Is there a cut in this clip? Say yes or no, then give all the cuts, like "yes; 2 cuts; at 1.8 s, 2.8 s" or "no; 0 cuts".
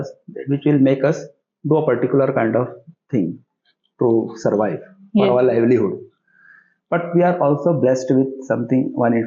no; 0 cuts